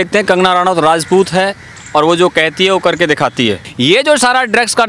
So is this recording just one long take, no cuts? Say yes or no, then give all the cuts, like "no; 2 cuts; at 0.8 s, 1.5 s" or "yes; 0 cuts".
no; 1 cut; at 3.7 s